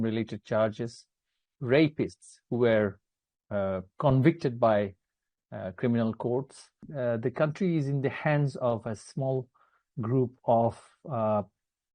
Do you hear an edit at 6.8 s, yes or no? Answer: yes